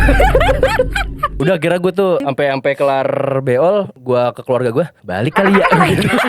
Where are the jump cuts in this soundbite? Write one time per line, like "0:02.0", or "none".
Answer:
0:01.3
0:02.2
0:03.9
0:05.0